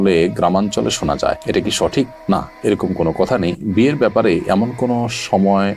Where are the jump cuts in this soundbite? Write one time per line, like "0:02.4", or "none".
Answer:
none